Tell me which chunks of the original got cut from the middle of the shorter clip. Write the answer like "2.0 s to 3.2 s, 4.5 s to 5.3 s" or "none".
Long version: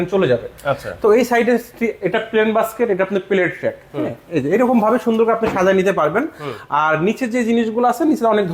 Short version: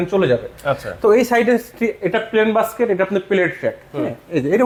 none

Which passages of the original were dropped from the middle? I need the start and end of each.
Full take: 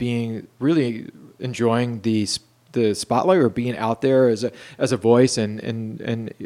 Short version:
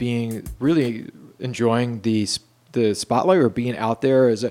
none

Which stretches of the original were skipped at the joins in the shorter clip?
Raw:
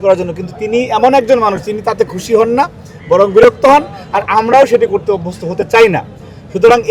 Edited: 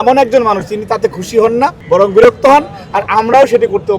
2.8 s to 3.0 s

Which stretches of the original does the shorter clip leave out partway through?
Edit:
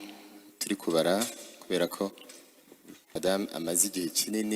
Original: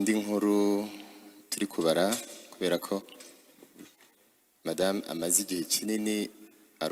4.1 s to 4.7 s

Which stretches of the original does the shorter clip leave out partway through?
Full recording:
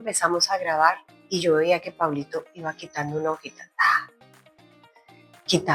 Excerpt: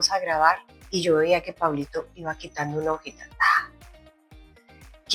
none

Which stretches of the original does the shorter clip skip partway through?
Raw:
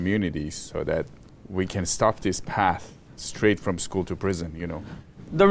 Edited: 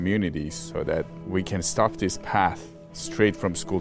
1.2 s to 1.4 s

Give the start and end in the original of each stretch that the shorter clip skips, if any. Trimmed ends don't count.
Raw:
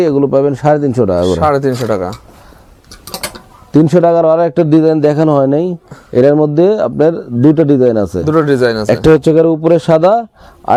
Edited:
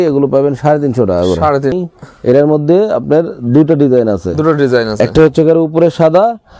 1.8 s to 5.6 s

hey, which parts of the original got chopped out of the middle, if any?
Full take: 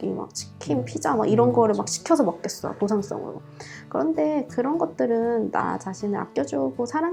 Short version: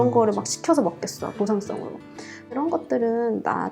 4.0 s to 4.6 s

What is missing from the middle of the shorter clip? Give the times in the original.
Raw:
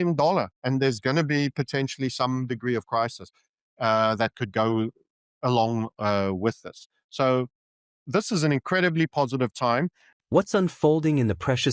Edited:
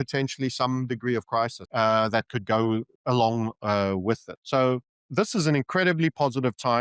3.2 s to 3.7 s, 5.0 s to 5.3 s, 6.7 s to 7.0 s, 7.6 s to 7.9 s

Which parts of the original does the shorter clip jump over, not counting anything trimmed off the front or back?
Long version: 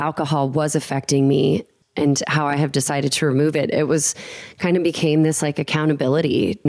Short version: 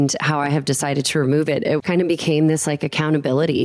3.9 s to 4.5 s

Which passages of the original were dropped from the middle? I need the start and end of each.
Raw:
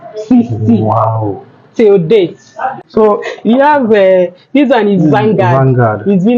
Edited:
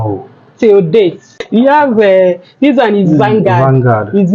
2.5 s to 3.3 s

